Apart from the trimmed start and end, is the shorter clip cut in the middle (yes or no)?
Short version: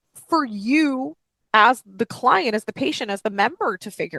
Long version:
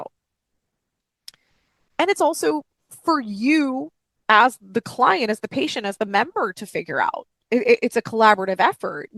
no